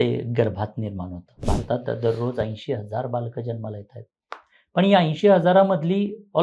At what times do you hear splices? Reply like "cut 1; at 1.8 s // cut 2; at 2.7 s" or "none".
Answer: cut 1; at 1.4 s

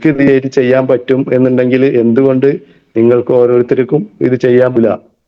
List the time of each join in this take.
none

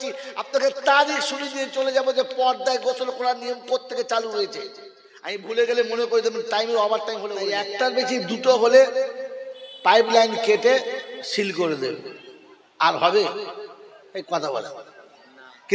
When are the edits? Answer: cut 1; at 7.6 s

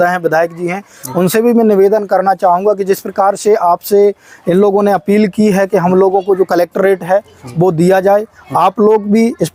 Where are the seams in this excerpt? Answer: none

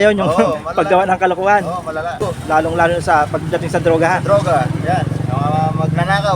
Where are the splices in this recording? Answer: cut 1; at 2.2 s

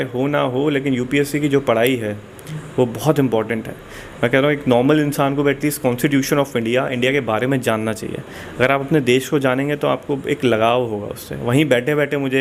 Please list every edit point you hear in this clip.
none

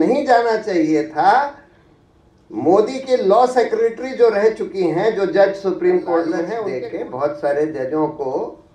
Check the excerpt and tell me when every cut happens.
cut 1; at 6.4 s

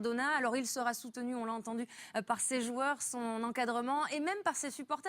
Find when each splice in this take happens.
cut 1; at 1.2 s

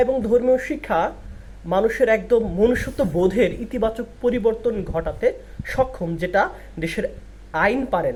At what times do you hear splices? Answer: none

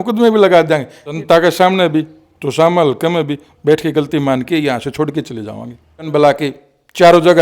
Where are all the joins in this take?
cut 1; at 1.2 s // cut 2; at 6.1 s

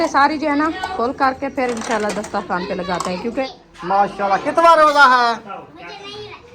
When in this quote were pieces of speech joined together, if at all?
cut 1; at 3.6 s

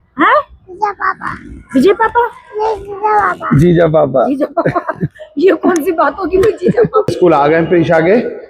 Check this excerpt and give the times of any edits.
cut 1; at 7.1 s

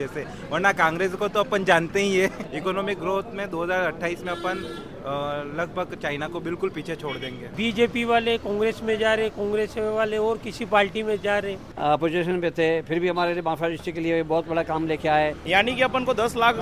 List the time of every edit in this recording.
cut 1; at 2.5 s // cut 2; at 7.5 s // cut 3; at 11.7 s // cut 4; at 15.4 s

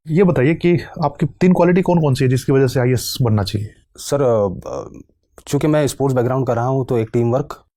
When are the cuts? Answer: none

